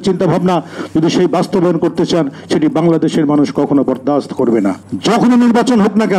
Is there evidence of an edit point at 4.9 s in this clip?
yes; 1 cut; at 4.9 s

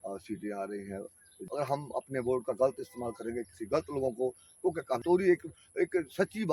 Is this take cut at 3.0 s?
no; 2 cuts; at 1.3 s, 5.0 s

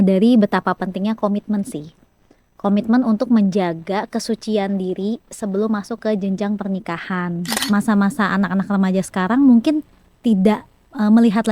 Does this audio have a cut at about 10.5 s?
no; 1 cut; at 7.5 s

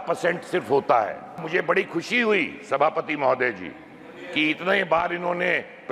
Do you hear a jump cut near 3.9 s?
no; 1 cut; at 1.4 s

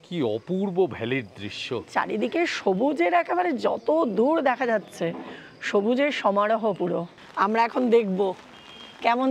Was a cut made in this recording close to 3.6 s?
no; 2 cuts; at 1.9 s, 7.2 s

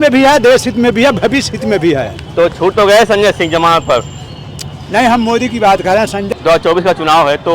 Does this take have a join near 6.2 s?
yes; 1 cut; at 6.2 s

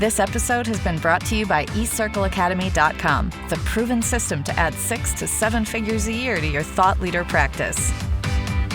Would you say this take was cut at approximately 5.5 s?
no; 1 cut; at 7.7 s

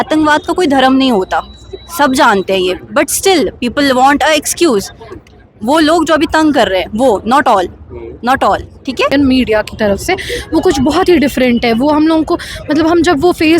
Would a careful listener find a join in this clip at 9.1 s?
yes; 1 cut; at 9.1 s

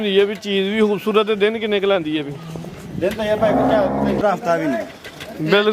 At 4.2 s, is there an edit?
yes; 1 cut; at 4.2 s

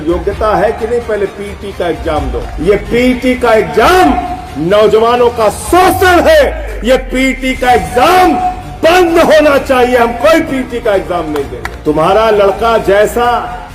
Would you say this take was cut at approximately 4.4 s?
no; 3 cuts; at 2.4 s, 6.7 s, 11.6 s

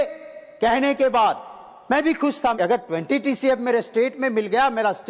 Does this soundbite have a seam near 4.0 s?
no; 1 cut; at 2.5 s

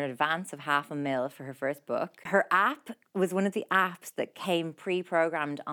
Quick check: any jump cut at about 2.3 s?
yes; 1 cut; at 2.3 s

